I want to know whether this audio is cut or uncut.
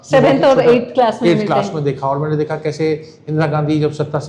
uncut